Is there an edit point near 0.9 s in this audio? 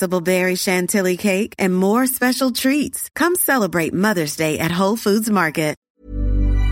no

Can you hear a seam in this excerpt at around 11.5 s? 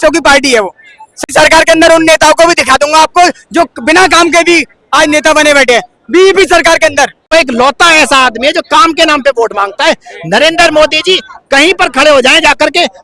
no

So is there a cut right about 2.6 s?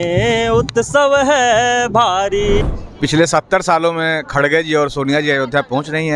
yes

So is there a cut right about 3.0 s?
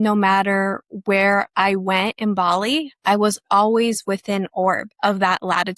no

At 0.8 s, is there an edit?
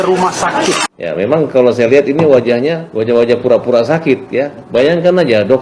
yes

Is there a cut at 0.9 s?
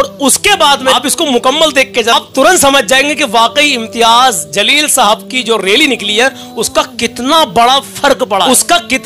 yes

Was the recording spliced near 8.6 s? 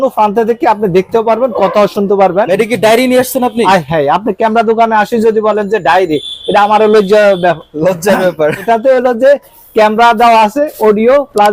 yes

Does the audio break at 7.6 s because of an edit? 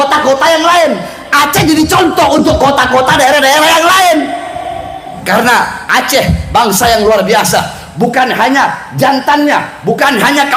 no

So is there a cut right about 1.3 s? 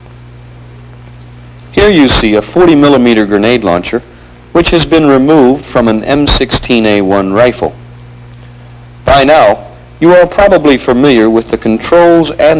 yes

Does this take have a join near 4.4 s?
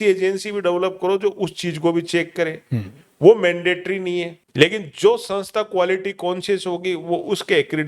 yes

